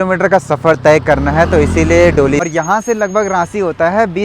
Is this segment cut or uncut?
cut